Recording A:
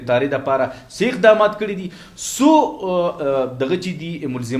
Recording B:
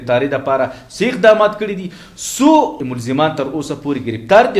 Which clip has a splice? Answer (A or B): B